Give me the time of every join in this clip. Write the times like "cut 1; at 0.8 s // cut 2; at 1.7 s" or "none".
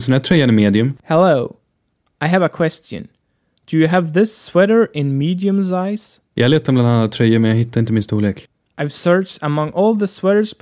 none